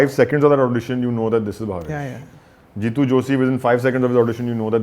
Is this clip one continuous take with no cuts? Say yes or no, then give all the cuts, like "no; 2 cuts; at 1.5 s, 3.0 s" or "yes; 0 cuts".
yes; 0 cuts